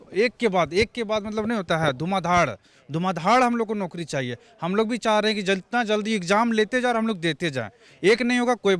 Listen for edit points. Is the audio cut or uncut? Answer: uncut